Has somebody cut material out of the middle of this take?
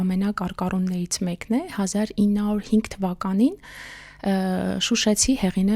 no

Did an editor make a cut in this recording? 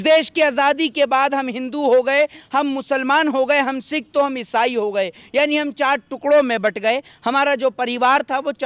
no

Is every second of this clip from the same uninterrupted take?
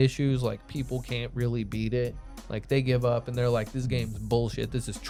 yes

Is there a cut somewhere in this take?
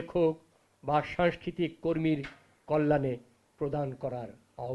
no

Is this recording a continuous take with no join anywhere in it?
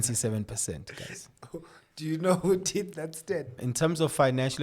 no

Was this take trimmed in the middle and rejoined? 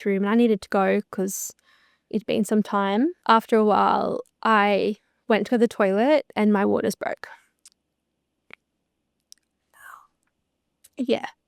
yes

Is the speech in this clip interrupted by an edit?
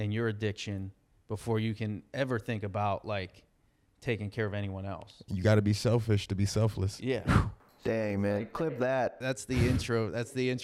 yes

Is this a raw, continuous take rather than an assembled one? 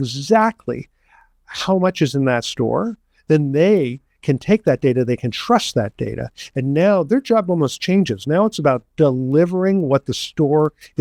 yes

